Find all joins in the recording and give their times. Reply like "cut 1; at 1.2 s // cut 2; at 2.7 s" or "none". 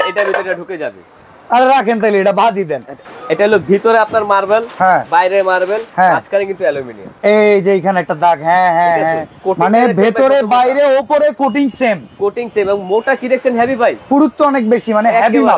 cut 1; at 3.0 s // cut 2; at 9.4 s // cut 3; at 14.0 s